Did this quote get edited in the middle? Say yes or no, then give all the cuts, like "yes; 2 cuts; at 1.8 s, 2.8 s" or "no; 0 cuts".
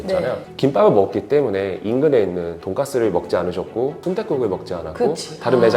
yes; 2 cuts; at 2.6 s, 4.0 s